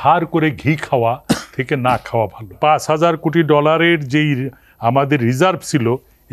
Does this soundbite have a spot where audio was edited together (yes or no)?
yes